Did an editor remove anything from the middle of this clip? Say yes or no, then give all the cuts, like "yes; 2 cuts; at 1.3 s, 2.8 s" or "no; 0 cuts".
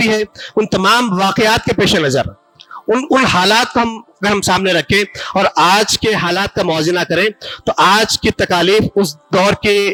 no; 0 cuts